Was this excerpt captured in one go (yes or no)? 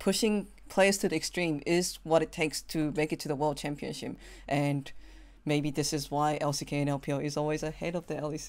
yes